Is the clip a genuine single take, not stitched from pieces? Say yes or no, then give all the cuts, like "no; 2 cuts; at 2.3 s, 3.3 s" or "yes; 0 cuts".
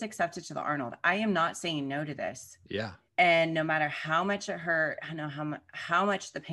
no; 1 cut; at 3.0 s